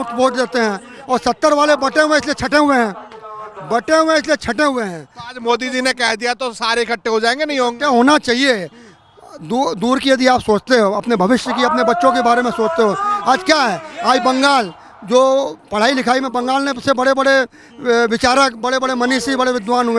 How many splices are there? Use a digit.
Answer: 0